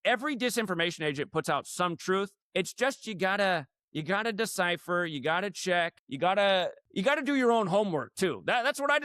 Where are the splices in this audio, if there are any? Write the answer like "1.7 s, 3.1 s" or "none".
2.4 s, 6.0 s, 6.8 s